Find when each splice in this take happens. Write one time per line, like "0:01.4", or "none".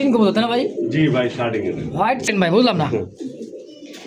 0:02.3